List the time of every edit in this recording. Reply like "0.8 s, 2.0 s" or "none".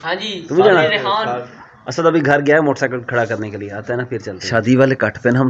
4.4 s